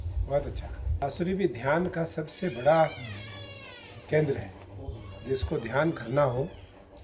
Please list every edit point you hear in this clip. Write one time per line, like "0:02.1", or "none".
0:01.0